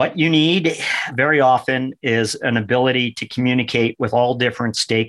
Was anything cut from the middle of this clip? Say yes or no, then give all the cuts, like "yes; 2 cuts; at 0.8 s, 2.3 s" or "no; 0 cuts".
yes; 1 cut; at 1.1 s